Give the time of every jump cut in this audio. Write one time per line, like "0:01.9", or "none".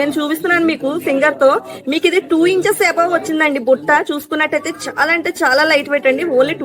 none